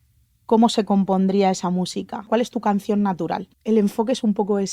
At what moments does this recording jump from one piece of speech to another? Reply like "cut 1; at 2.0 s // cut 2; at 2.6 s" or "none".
cut 1; at 2.3 s // cut 2; at 3.5 s